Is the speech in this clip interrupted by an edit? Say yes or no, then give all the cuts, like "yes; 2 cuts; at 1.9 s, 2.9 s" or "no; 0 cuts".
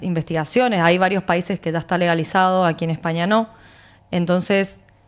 no; 0 cuts